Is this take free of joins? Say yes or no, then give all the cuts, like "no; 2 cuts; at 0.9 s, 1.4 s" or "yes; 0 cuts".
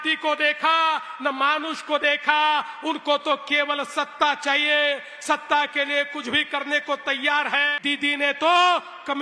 no; 1 cut; at 7.7 s